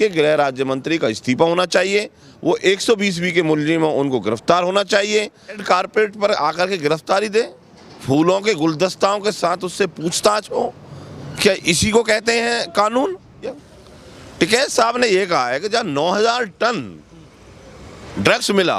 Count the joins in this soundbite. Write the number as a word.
two